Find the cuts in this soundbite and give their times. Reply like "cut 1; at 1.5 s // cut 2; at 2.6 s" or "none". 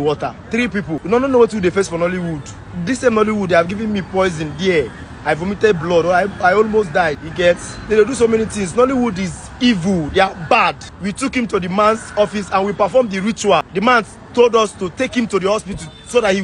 cut 1; at 1.0 s // cut 2; at 7.2 s // cut 3; at 10.9 s // cut 4; at 13.7 s